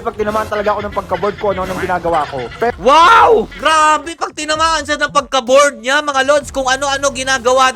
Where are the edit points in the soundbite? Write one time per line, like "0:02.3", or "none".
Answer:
none